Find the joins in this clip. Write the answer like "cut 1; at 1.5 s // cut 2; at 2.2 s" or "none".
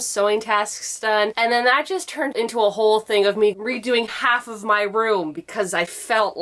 cut 1; at 1.3 s // cut 2; at 3.5 s